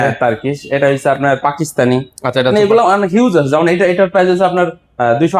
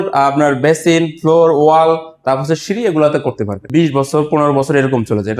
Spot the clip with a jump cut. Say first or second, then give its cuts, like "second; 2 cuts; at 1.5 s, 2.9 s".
second; 1 cut; at 3.6 s